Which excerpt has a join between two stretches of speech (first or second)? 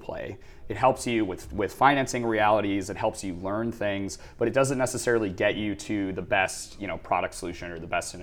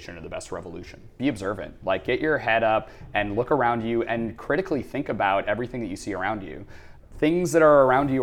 second